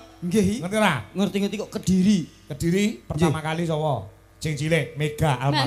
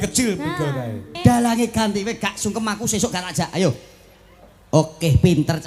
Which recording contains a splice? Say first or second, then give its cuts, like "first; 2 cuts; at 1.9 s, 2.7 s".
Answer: second; 1 cut; at 1.2 s